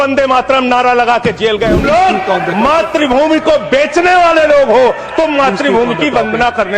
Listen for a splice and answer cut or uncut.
cut